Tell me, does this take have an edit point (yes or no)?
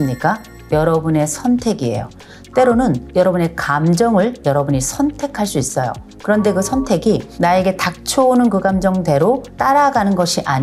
no